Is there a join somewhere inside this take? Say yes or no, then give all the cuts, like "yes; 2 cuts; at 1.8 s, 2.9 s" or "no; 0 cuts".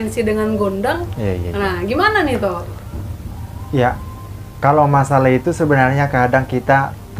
no; 0 cuts